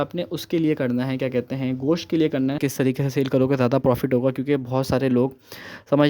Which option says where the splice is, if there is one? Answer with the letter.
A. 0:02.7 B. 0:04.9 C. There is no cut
A